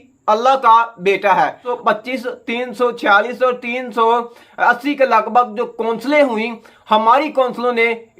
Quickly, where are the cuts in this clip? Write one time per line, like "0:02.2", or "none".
0:01.7